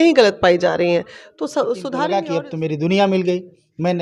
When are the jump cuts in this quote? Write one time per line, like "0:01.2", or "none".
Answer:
0:01.9